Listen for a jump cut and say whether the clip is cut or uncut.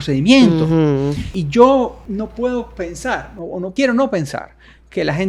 cut